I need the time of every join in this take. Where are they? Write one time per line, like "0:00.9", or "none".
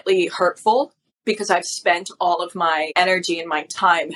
0:01.0
0:02.9